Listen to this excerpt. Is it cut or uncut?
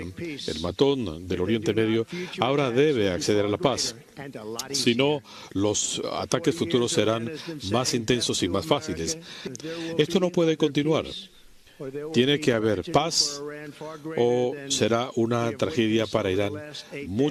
uncut